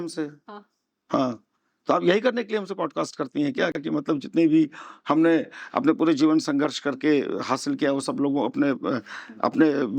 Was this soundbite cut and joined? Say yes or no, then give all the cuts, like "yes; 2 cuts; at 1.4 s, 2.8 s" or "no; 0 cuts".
no; 0 cuts